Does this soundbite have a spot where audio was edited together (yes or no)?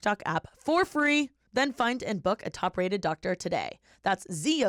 no